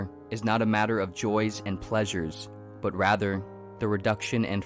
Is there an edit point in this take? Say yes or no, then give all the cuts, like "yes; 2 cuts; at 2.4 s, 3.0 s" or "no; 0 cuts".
no; 0 cuts